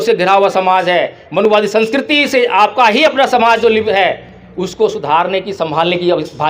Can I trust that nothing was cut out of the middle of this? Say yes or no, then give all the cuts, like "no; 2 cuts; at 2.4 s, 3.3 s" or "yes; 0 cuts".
no; 1 cut; at 3.9 s